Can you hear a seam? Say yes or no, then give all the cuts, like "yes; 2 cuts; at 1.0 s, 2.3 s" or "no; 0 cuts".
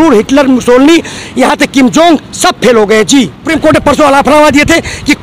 yes; 1 cut; at 3.5 s